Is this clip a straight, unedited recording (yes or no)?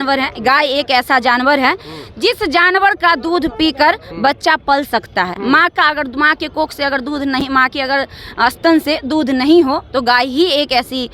yes